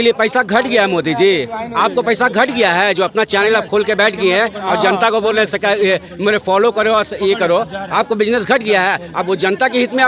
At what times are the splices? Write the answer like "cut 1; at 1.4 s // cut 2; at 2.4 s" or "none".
none